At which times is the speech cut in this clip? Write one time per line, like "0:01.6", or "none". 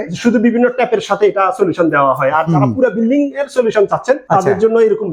0:04.2

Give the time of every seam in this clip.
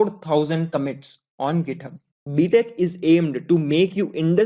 0:02.3

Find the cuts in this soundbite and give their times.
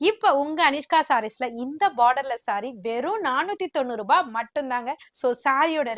0:05.0

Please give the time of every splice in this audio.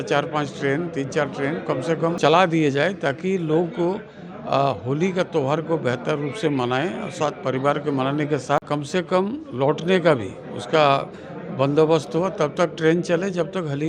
0:02.2
0:08.6

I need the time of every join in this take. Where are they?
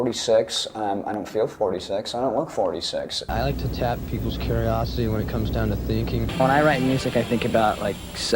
0:03.3
0:06.3

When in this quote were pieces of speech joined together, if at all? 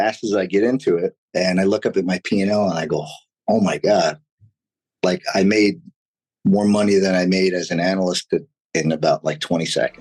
0:01.2
0:08.5

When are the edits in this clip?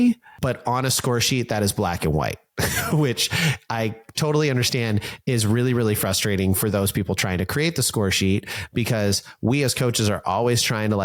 none

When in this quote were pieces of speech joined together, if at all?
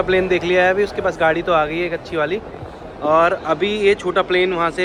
none

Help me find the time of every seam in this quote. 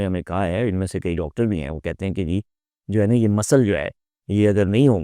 none

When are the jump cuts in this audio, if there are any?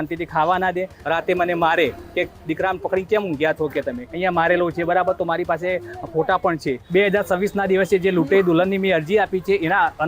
0:00.9
0:04.0
0:06.8

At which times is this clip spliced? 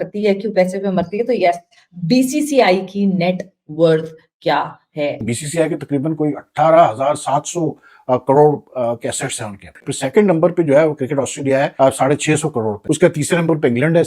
0:05.3
0:09.8
0:11.7
0:12.8

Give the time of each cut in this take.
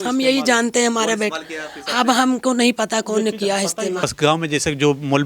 0:04.1

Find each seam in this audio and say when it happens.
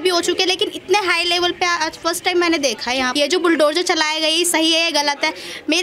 0:03.1

